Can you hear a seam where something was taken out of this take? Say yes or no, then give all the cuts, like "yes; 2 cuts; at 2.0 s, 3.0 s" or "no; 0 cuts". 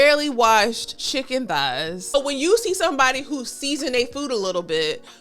yes; 2 cuts; at 0.9 s, 2.1 s